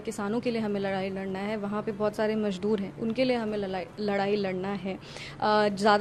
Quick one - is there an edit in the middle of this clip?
no; 0 cuts

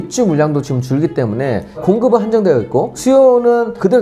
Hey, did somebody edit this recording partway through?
no; 0 cuts

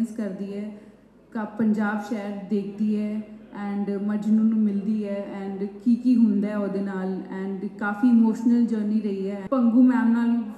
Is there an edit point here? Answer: yes; 1 cut; at 9.4 s

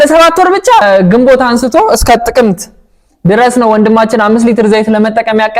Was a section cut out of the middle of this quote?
no; 0 cuts

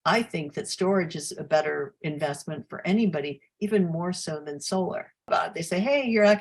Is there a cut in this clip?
yes; 1 cut; at 5.3 s

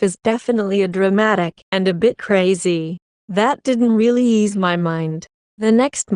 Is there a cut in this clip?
no; 0 cuts

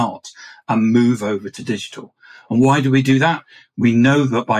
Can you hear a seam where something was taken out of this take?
yes; 1 cut; at 1.5 s

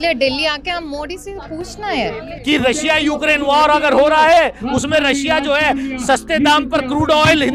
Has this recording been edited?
yes; 1 cut; at 2.3 s

